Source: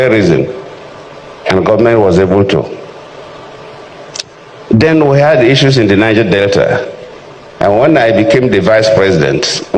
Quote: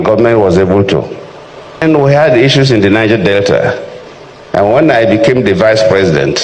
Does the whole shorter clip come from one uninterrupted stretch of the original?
no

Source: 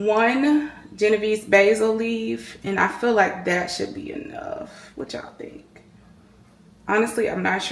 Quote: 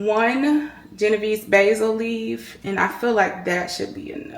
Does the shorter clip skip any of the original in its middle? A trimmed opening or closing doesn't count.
no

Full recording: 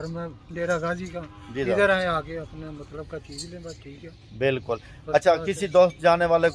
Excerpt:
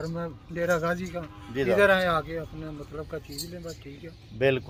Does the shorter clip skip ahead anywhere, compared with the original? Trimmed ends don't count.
no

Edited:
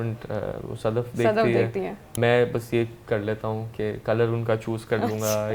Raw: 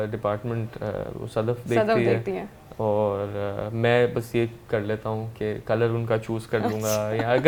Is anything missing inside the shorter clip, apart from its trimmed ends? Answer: yes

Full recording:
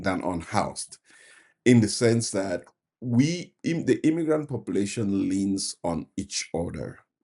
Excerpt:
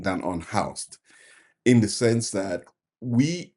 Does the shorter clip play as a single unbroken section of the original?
yes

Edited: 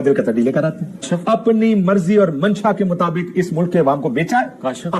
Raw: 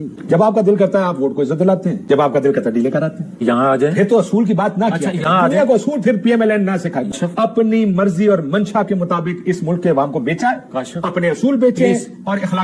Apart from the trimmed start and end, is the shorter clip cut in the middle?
yes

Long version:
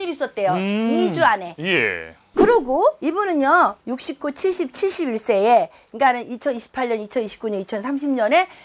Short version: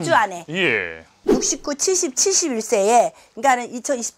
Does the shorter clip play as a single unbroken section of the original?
no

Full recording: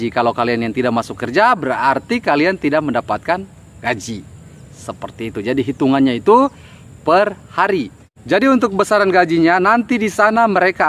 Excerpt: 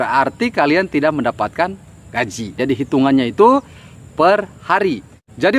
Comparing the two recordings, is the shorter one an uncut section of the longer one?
no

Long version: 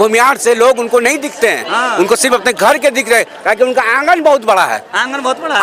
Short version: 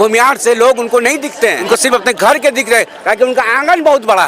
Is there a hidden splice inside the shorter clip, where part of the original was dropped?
yes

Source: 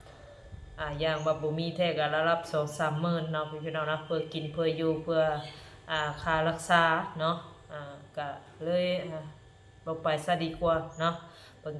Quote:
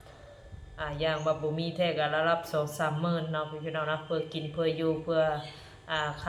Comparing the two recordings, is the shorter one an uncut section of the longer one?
yes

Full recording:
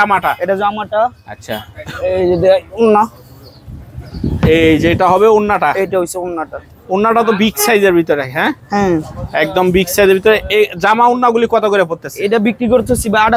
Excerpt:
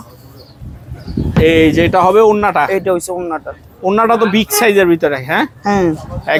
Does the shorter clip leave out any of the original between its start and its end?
no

